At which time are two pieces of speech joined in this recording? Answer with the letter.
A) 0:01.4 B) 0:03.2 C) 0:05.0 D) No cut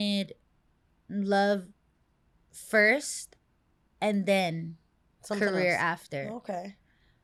D